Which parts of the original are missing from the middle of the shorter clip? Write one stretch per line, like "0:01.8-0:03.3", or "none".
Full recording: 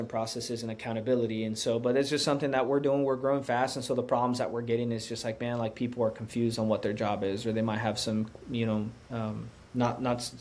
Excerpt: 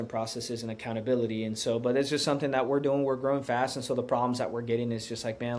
none